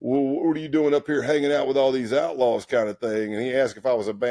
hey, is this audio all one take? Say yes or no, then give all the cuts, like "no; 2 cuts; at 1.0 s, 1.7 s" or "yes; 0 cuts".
yes; 0 cuts